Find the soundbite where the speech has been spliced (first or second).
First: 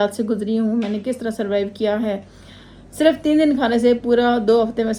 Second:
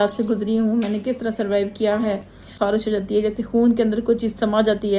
second